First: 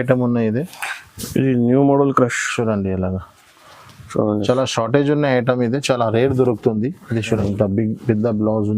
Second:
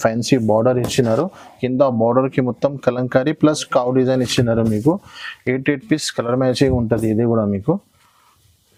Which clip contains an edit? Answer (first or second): first